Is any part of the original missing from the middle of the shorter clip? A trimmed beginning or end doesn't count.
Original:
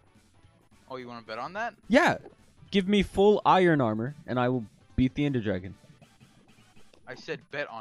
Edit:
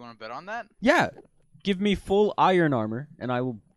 no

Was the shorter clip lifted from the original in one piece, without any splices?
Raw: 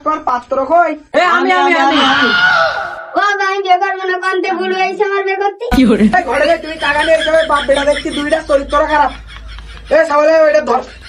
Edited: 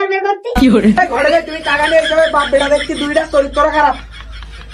yes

